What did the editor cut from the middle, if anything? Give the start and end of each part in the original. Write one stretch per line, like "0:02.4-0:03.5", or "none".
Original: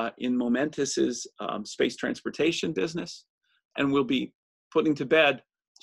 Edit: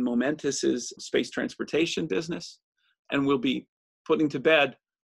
0:01.3-0:01.6